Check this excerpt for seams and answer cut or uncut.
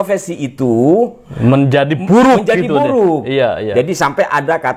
uncut